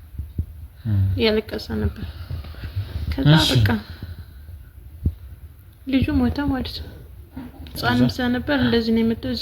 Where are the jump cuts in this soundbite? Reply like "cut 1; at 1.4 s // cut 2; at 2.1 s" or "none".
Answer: cut 1; at 7.8 s